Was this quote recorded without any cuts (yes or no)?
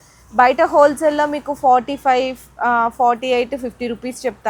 yes